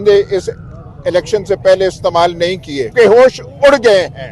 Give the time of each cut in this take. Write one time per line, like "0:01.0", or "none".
0:02.9